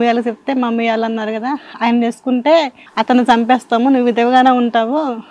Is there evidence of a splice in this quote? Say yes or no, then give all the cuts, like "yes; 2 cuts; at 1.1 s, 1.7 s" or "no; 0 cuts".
no; 0 cuts